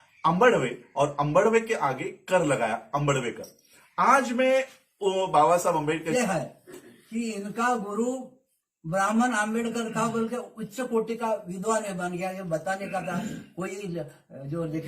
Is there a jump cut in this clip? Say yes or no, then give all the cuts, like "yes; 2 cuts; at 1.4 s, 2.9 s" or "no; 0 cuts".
yes; 1 cut; at 6.1 s